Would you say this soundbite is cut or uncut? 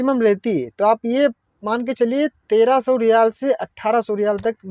uncut